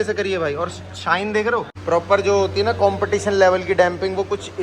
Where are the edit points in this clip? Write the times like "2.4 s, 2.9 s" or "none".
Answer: 1.7 s

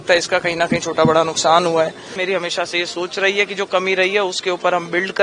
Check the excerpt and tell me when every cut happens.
2.2 s

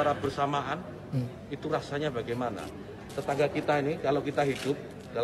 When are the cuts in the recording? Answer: 3.0 s

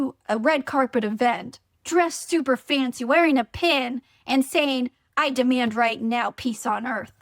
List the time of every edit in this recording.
none

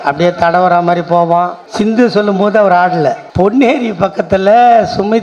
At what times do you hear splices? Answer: 1.6 s, 3.2 s

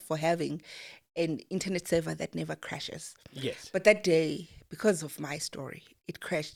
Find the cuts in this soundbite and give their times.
none

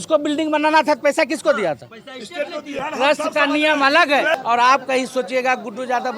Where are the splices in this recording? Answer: 2.7 s, 4.3 s

